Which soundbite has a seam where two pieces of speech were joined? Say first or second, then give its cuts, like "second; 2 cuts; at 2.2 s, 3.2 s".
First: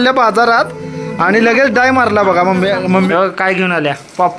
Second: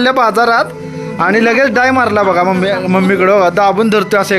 first; 1 cut; at 3.1 s